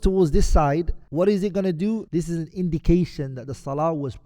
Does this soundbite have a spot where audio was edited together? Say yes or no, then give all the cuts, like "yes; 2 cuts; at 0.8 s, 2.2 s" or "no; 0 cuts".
yes; 2 cuts; at 1.0 s, 2.1 s